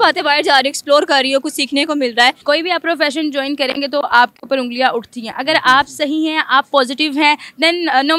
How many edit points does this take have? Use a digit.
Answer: 1